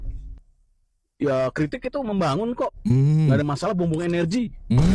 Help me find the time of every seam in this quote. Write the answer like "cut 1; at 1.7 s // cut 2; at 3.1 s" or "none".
none